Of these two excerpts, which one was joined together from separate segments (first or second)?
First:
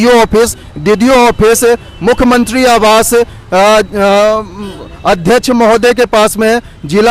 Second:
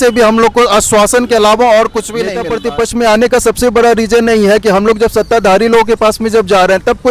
second